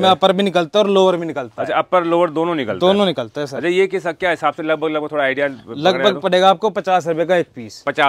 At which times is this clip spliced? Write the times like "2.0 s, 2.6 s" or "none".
none